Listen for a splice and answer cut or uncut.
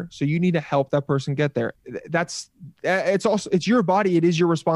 cut